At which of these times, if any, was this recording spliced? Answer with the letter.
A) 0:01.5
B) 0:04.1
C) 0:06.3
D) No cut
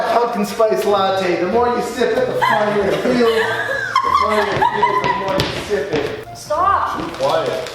C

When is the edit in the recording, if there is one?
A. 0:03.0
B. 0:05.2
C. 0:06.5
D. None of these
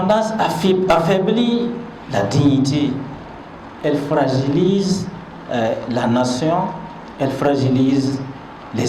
D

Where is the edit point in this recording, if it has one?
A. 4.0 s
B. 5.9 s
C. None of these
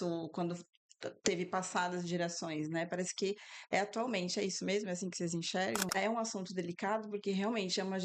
B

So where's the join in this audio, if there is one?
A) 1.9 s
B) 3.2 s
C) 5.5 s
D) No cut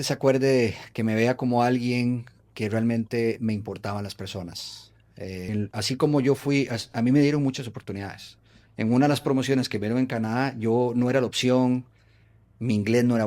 C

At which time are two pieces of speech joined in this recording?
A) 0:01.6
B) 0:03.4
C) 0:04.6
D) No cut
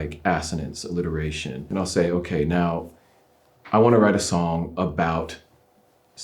A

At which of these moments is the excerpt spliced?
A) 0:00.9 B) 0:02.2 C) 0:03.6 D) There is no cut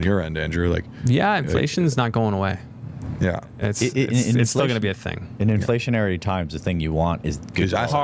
A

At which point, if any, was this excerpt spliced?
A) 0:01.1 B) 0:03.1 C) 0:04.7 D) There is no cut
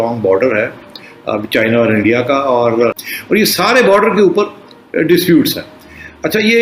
B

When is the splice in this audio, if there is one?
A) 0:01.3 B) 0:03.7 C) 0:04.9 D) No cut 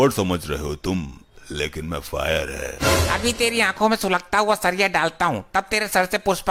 D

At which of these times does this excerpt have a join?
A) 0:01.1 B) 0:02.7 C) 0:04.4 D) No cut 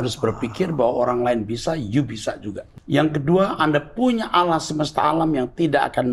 B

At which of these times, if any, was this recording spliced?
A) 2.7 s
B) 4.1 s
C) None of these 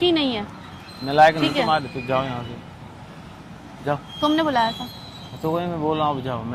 C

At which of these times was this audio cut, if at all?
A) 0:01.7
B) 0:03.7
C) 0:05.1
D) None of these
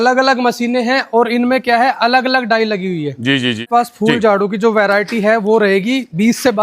B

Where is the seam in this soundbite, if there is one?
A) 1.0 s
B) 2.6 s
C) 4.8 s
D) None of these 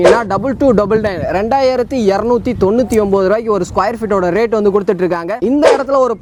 D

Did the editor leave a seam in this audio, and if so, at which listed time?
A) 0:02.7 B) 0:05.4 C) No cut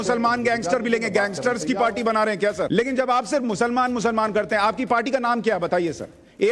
A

